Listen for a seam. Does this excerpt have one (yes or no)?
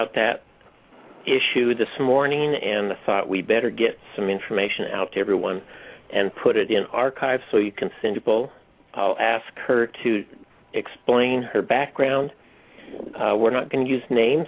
no